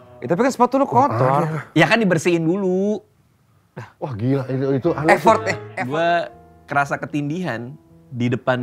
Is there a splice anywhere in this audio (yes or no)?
yes